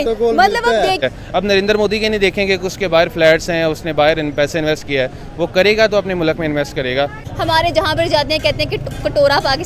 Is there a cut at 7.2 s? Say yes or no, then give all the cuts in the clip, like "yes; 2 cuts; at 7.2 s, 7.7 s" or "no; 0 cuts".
yes; 2 cuts; at 1.0 s, 7.2 s